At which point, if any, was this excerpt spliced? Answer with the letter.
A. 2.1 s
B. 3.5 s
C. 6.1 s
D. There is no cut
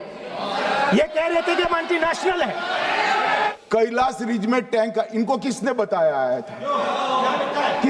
B